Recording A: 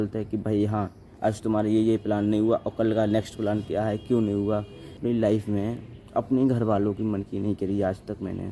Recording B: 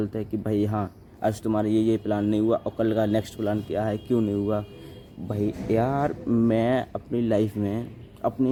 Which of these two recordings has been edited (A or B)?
A